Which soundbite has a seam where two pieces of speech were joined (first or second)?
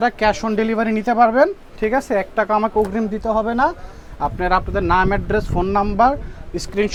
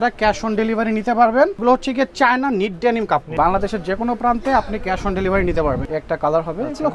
second